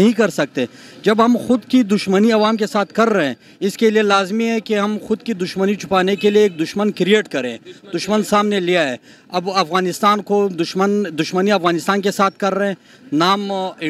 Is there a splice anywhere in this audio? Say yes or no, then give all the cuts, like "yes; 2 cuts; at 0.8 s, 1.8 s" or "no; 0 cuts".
no; 0 cuts